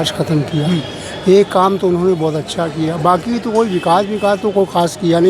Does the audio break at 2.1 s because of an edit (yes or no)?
no